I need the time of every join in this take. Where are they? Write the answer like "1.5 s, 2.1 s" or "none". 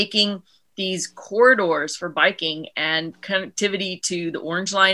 none